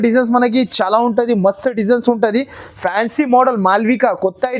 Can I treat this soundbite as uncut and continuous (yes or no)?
yes